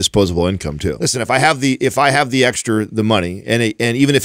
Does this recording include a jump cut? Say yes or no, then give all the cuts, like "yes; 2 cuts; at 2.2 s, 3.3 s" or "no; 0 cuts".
yes; 1 cut; at 1.0 s